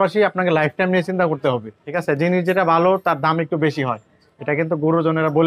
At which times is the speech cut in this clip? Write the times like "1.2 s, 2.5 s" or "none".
1.8 s